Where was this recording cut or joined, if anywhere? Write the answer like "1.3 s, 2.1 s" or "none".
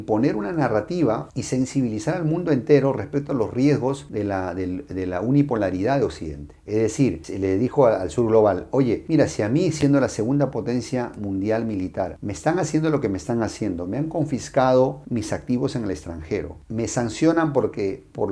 none